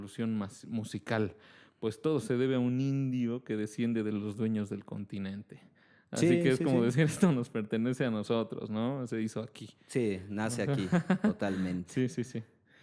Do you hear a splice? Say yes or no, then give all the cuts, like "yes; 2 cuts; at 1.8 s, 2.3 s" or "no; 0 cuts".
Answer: no; 0 cuts